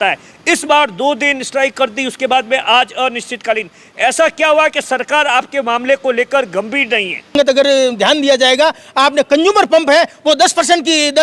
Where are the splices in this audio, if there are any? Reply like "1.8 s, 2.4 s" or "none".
7.3 s